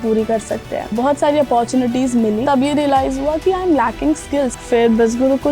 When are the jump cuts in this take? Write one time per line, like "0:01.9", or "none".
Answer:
0:00.9
0:02.4
0:04.6